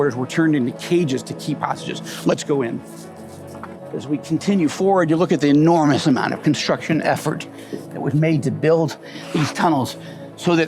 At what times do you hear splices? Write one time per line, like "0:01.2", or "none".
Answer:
0:03.7